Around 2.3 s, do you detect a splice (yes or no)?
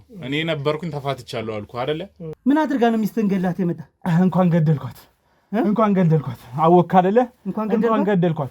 yes